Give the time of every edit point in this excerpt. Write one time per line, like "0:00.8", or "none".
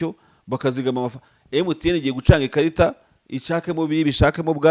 none